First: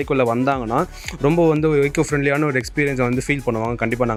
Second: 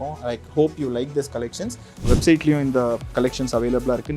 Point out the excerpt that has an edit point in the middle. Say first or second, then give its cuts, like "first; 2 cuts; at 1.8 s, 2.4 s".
second; 1 cut; at 2.0 s